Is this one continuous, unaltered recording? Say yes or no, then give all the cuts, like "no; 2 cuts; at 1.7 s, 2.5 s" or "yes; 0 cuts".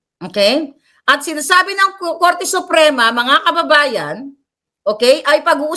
yes; 0 cuts